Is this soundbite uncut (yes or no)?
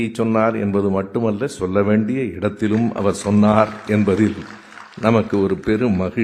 yes